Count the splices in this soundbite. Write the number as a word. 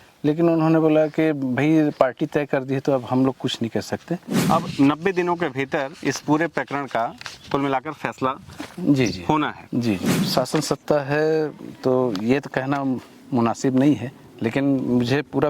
two